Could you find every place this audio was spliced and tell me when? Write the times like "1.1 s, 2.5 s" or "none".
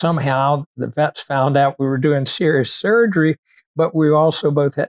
none